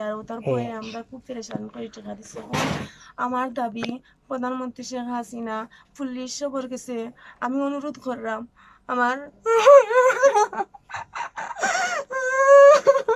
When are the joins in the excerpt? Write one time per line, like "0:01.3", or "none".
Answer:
none